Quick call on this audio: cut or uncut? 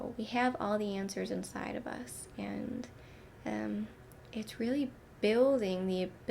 uncut